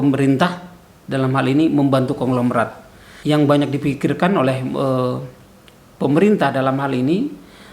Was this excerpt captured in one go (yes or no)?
no